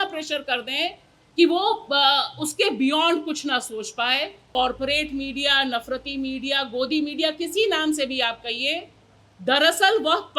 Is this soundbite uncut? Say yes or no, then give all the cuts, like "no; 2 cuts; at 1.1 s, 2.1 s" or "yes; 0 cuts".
no; 1 cut; at 4.4 s